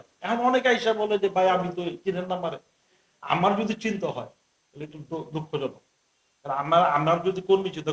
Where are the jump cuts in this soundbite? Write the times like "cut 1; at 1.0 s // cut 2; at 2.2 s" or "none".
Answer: none